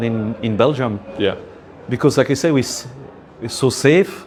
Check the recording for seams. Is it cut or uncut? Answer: uncut